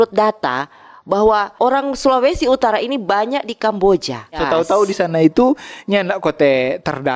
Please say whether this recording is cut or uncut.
cut